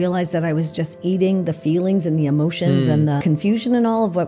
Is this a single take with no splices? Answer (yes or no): no